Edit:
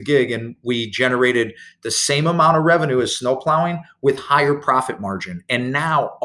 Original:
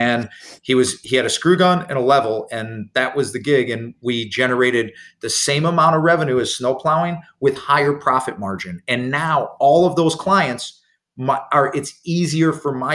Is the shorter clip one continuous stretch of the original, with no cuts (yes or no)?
yes